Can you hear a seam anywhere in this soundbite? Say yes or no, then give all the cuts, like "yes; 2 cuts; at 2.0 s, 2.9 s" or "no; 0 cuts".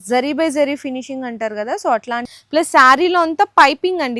yes; 1 cut; at 2.3 s